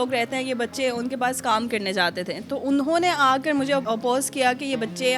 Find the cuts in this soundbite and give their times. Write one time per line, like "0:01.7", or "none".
0:03.8